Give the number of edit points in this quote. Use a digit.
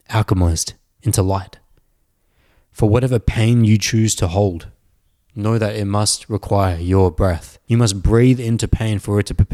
1